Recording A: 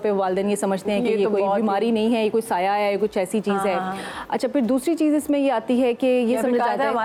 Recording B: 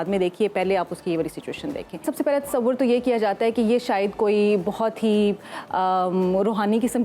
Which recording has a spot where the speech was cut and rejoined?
B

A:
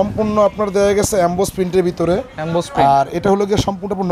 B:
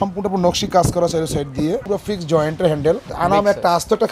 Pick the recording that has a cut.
B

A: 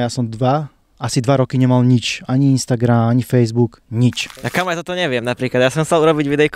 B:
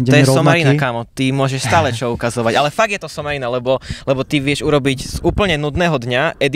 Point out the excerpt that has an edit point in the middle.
A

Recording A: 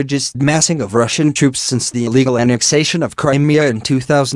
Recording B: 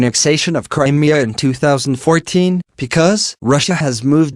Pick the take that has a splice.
B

